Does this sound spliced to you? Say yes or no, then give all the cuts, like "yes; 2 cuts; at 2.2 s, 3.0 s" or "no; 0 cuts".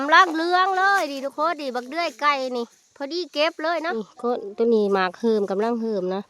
yes; 1 cut; at 3.9 s